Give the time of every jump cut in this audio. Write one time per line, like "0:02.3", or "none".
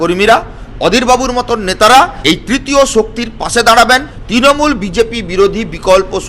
0:02.2
0:04.2